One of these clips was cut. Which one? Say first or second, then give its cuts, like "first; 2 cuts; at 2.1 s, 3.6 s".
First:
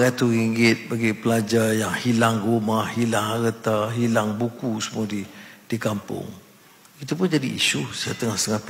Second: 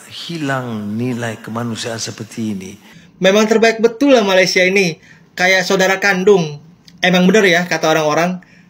second; 1 cut; at 3.0 s